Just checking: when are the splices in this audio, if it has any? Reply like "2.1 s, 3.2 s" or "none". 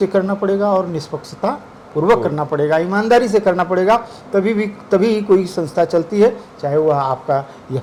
none